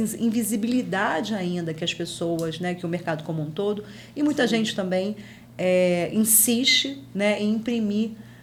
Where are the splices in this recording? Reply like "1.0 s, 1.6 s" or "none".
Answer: none